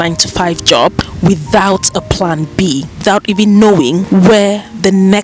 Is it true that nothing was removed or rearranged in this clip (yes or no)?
no